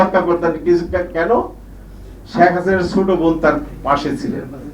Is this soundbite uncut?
yes; 0 cuts

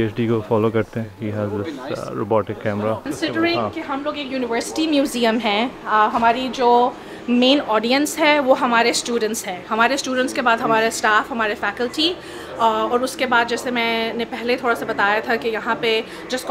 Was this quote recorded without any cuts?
no; 2 cuts; at 1.2 s, 3.0 s

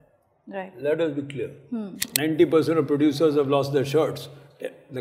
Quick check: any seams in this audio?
yes; 1 cut; at 2.1 s

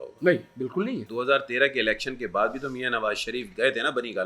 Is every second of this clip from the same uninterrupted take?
no; 1 cut; at 1.1 s

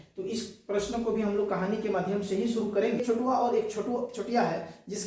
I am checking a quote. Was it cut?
yes; 1 cut; at 3.0 s

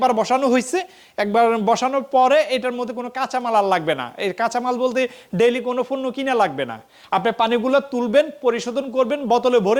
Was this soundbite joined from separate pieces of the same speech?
no; 0 cuts

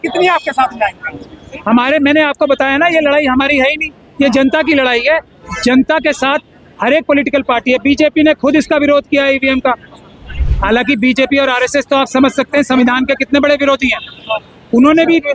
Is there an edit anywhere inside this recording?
no; 0 cuts

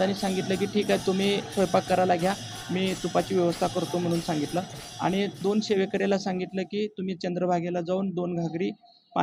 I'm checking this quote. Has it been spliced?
no; 0 cuts

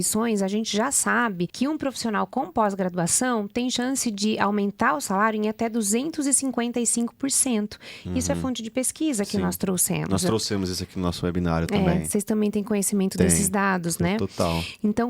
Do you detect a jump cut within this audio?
yes; 1 cut; at 1.5 s

